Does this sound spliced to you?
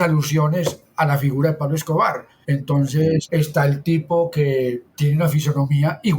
yes; 3 cuts; at 2.3 s, 3.3 s, 4.9 s

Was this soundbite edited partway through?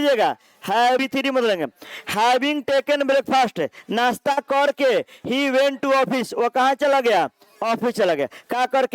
yes; 1 cut; at 1.0 s

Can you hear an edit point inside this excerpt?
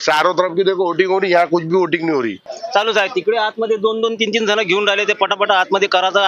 yes; 1 cut; at 2.5 s

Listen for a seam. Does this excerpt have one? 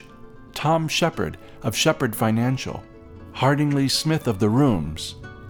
no; 0 cuts

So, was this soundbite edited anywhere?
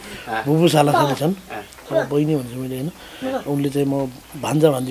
no; 0 cuts

